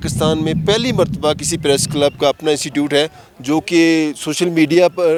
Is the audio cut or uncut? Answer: uncut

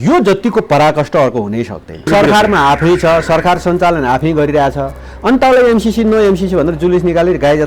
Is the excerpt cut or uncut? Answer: cut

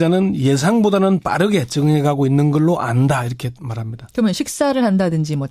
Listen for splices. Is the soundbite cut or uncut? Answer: cut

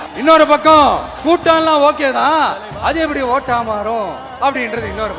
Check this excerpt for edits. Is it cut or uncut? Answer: uncut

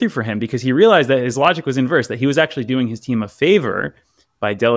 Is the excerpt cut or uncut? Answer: uncut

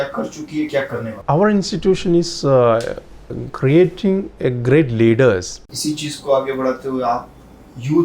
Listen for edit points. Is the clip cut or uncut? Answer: cut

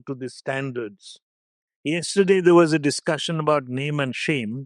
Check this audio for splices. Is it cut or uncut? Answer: uncut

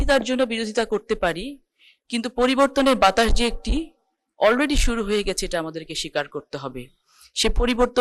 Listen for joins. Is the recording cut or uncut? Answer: uncut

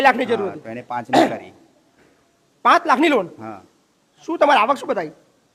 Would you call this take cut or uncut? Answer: uncut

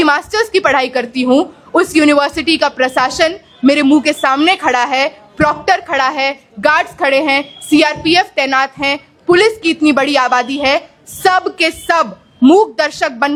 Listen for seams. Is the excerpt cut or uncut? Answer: uncut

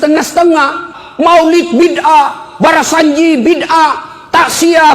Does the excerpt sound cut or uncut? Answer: cut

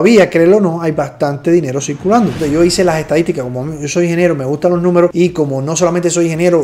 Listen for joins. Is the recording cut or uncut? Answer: cut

